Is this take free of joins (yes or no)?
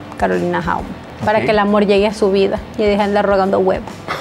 yes